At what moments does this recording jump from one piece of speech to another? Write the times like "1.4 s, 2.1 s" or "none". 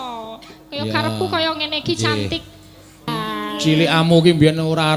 3.1 s